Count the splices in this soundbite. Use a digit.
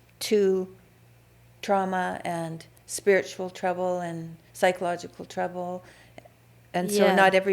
0